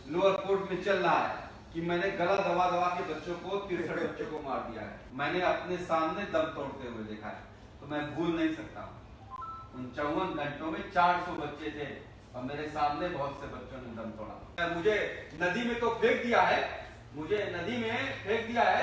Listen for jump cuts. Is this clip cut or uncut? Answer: cut